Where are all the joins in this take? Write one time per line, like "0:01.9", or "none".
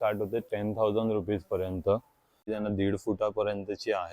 0:02.5

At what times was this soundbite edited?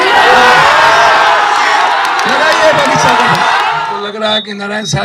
0:03.9

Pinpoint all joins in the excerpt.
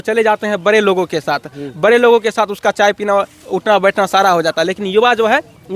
none

